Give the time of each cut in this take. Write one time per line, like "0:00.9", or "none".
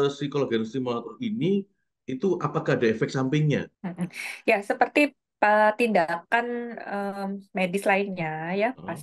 0:03.8